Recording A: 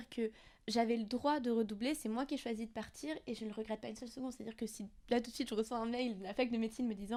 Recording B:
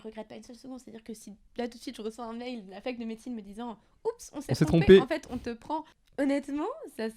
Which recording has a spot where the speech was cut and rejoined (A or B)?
B